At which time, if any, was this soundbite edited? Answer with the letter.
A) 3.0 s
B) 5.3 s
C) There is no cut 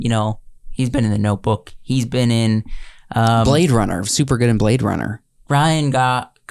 B